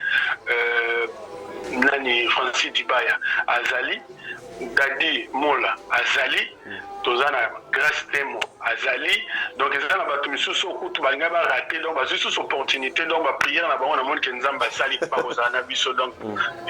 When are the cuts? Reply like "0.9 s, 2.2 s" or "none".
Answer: none